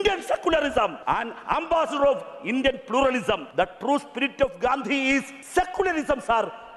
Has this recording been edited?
yes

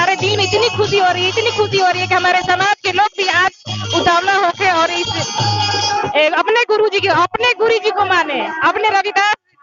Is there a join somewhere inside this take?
no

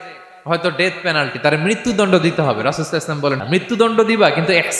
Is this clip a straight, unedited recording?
no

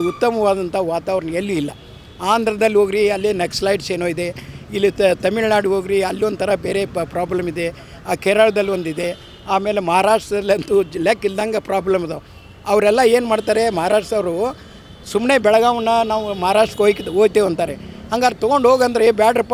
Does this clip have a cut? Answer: no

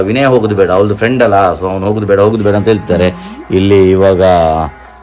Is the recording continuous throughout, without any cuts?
yes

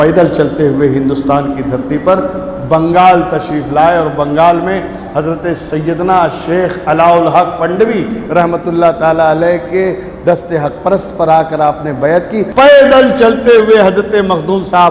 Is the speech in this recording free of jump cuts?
no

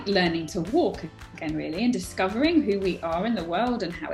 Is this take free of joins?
yes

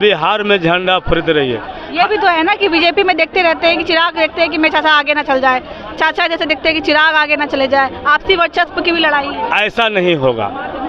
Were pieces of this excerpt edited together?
no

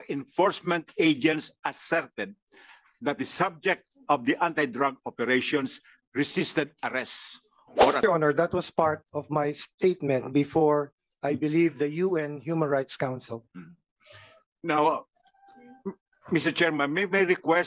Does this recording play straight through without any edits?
no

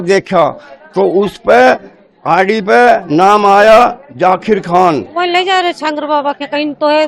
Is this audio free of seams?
no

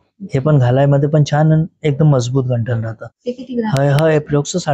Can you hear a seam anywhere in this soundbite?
no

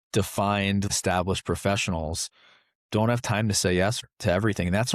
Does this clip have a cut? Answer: yes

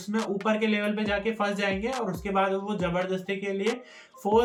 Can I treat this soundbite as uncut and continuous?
yes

